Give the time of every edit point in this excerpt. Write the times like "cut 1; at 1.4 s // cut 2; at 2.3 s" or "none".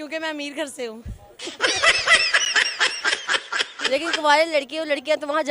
cut 1; at 3.8 s